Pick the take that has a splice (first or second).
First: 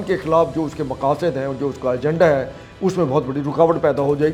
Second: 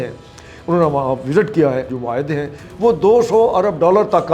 second